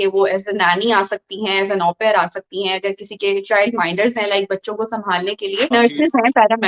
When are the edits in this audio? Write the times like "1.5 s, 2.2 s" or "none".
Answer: 5.7 s